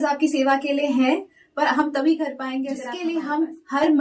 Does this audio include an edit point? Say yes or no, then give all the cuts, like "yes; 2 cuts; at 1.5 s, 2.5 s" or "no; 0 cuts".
yes; 1 cut; at 2.8 s